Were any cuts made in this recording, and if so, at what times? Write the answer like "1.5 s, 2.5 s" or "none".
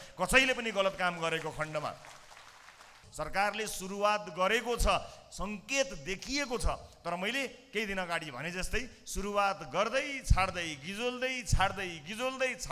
3.0 s

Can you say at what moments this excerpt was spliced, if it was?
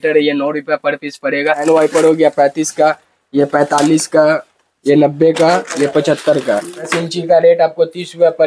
1.6 s, 6.9 s

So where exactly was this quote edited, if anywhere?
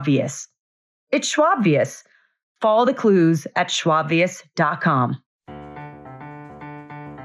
5.5 s

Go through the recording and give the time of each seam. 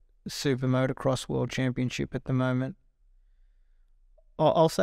none

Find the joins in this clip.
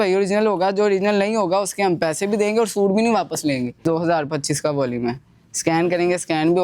3.8 s

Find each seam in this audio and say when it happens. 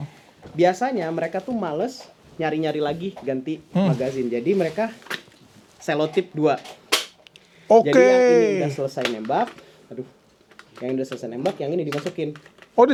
none

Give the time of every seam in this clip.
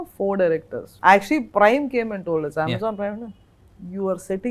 0.9 s

